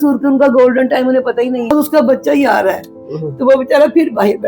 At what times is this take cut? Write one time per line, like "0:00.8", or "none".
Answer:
0:01.7